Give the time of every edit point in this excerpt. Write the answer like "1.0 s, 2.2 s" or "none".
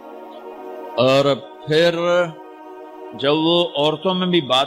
none